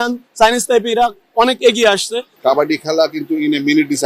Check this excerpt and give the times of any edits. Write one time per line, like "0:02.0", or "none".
0:02.3